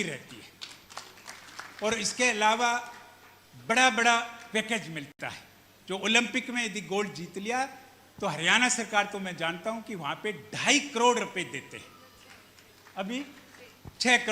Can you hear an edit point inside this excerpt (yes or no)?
no